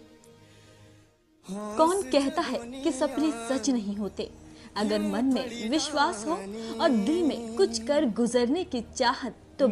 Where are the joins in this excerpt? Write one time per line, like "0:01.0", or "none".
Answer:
0:06.5